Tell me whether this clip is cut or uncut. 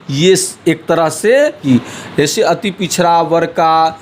cut